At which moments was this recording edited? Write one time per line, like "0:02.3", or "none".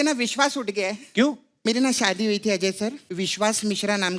0:01.5
0:03.0